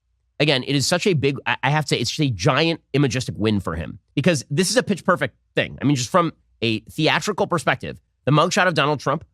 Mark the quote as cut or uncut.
cut